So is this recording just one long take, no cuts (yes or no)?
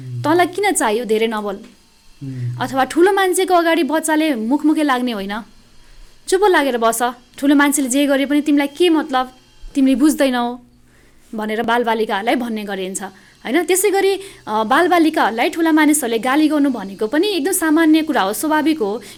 yes